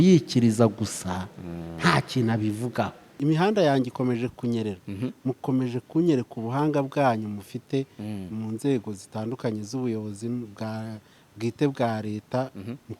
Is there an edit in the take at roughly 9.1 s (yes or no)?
no